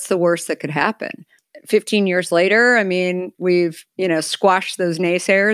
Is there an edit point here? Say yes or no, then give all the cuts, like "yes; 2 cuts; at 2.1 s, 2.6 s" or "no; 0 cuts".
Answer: yes; 1 cut; at 3.8 s